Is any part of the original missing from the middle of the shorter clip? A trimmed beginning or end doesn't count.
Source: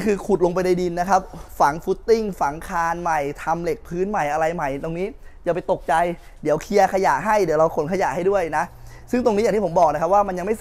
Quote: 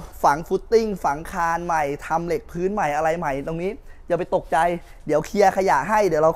no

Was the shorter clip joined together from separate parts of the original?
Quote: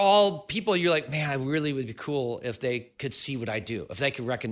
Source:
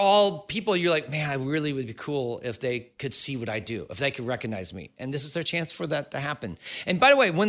no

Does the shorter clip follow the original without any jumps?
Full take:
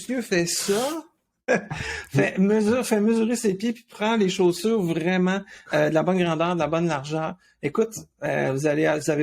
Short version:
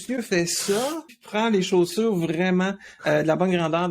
no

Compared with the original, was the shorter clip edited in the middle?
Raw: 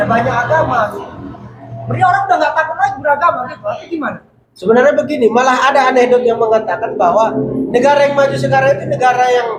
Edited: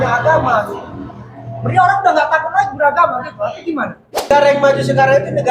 yes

